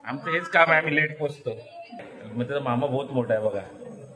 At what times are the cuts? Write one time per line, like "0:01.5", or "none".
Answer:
0:02.2